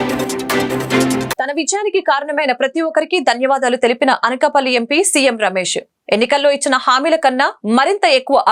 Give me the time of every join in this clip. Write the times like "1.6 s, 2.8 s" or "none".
1.3 s